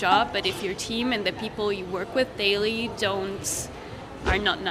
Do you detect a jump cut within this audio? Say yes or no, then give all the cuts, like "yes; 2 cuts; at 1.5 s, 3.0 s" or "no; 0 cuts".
no; 0 cuts